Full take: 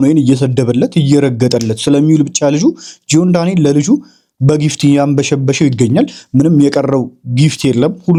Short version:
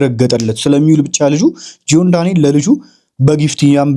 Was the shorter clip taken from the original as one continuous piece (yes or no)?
yes